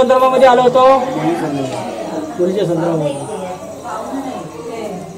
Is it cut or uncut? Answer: uncut